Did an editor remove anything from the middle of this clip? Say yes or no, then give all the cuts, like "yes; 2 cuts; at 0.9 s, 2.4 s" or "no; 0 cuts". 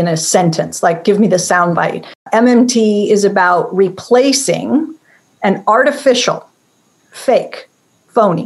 yes; 1 cut; at 2.3 s